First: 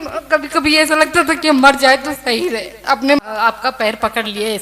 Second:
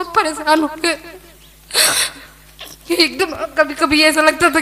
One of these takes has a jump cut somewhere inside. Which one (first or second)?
first